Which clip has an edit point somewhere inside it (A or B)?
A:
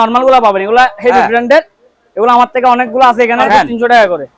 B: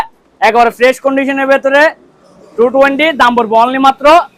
A